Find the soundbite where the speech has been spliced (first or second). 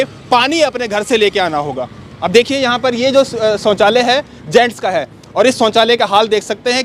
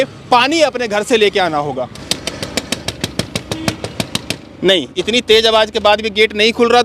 second